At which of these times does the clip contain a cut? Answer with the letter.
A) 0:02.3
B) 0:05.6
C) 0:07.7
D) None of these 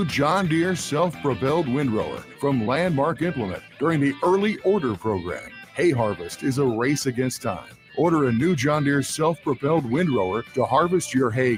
D